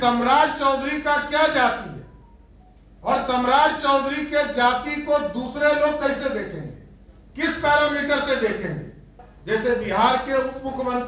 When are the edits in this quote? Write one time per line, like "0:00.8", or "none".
0:09.3